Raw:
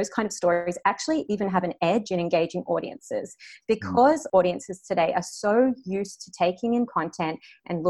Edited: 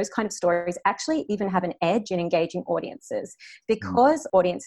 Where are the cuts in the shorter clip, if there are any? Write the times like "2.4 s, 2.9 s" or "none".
none

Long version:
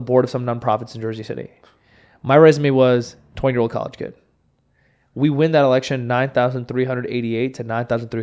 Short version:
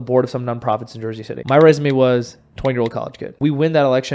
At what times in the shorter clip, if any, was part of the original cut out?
1.3 s, 3.2 s

